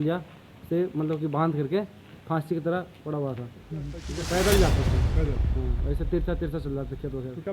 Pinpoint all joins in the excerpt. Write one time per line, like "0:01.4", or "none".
0:04.0